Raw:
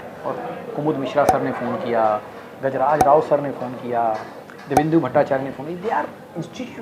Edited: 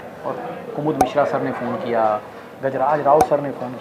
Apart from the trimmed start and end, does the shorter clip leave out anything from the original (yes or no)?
no